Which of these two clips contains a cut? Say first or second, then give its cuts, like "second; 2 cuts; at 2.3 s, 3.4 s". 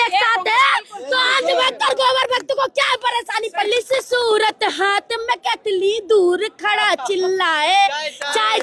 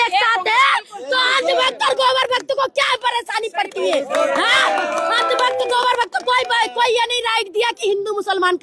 first; 1 cut; at 3.7 s